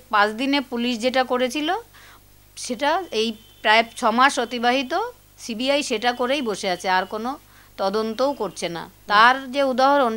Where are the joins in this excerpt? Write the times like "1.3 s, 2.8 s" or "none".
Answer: none